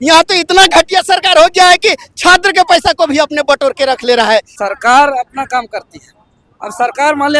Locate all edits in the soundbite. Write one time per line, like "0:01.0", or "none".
0:04.6